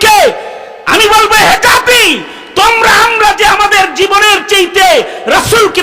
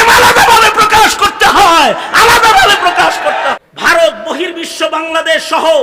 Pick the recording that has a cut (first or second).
second